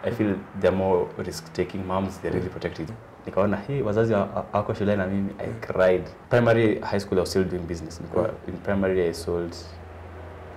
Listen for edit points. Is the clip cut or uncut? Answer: cut